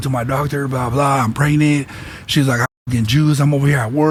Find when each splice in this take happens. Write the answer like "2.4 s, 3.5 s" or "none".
none